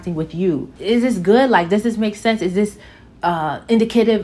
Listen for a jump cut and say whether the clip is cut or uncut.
uncut